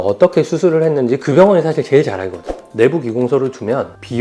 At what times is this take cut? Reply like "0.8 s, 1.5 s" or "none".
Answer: 2.6 s

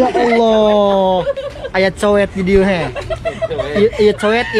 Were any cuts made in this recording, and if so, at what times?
none

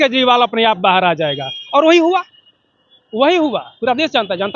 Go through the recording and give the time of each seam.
none

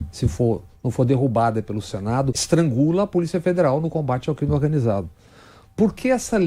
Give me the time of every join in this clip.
2.4 s

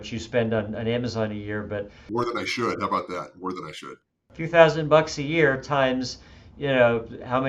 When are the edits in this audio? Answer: 2.0 s, 3.9 s

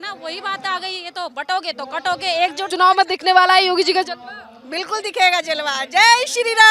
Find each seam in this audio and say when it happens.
2.7 s

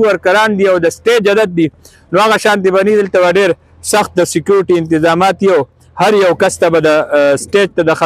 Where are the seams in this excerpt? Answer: none

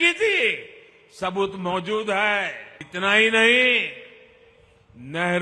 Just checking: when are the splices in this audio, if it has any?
2.9 s

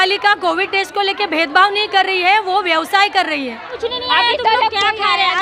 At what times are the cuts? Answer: 3.9 s

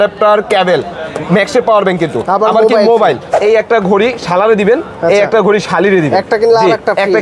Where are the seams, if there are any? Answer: 3.3 s

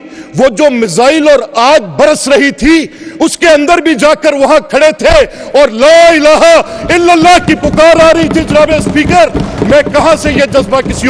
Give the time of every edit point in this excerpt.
none

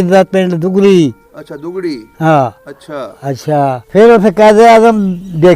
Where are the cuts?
3.8 s

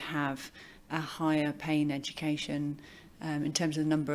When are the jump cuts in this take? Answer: none

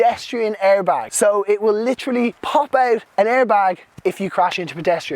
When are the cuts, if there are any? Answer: 1.1 s, 2.6 s

